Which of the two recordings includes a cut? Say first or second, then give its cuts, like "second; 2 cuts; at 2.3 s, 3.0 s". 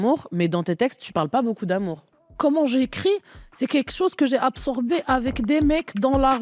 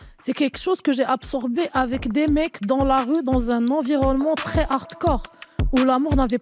first; 1 cut; at 2.2 s